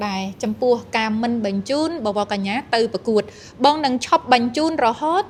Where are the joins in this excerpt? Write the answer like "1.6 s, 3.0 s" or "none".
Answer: none